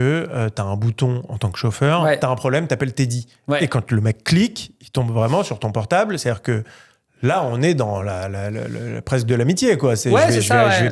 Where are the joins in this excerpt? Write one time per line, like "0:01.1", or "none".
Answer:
none